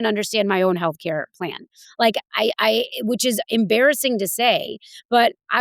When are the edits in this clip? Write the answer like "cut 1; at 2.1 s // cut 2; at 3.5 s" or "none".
none